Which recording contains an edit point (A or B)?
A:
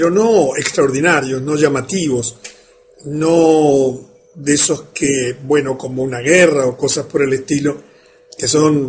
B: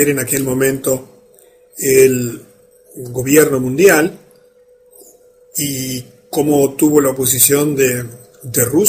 B